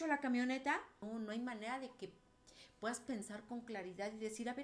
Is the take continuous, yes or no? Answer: no